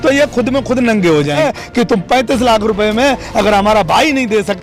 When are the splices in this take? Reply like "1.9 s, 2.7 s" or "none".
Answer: 1.4 s